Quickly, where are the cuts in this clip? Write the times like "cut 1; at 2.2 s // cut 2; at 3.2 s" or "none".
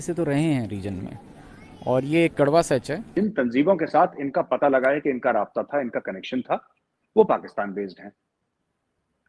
cut 1; at 3.0 s

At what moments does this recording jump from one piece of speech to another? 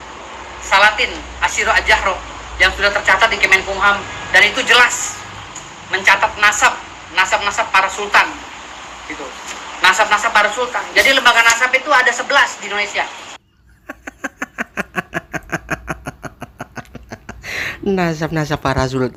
none

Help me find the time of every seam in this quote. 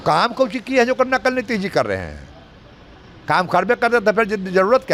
none

